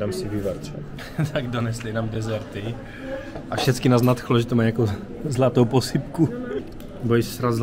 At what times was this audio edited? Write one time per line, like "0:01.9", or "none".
0:00.9
0:06.6